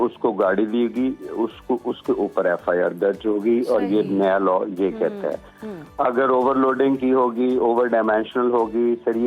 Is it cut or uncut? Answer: uncut